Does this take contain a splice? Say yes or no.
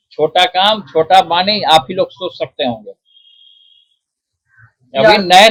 no